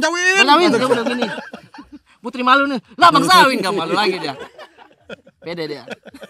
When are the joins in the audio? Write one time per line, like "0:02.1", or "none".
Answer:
none